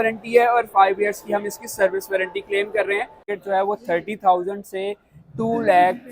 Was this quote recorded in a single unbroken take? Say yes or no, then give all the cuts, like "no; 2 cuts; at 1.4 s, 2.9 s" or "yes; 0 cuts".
no; 1 cut; at 3.3 s